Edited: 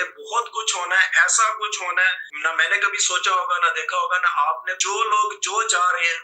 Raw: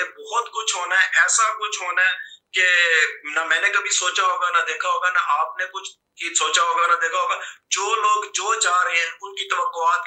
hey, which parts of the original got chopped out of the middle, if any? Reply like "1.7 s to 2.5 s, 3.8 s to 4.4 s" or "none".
2.3 s to 3.2 s, 5.6 s to 7.6 s